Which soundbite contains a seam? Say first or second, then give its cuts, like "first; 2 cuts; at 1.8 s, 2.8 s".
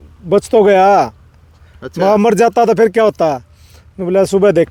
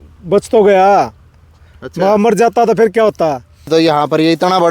second; 1 cut; at 3.7 s